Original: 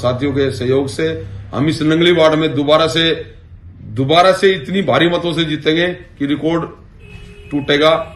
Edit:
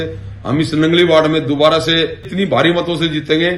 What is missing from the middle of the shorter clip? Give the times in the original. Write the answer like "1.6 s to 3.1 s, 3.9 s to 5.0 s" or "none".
3.4 s to 4.6 s